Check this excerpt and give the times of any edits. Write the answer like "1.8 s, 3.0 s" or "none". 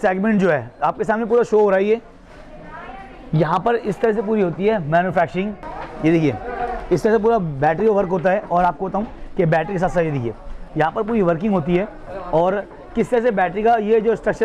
5.6 s